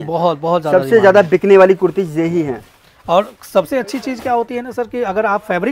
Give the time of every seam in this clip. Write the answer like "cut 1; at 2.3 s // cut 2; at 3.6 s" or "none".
none

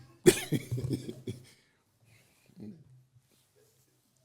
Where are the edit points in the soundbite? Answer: none

